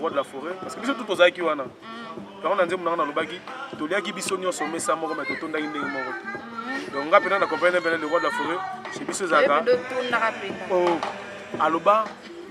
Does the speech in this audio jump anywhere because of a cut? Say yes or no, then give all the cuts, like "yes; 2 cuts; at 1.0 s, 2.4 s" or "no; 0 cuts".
no; 0 cuts